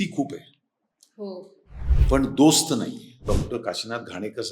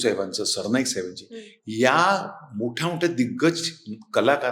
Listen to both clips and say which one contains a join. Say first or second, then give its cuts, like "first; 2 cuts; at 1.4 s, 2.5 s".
first; 1 cut; at 3.2 s